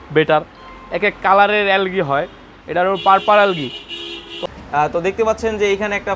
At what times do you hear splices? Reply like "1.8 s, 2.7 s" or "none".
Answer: 4.4 s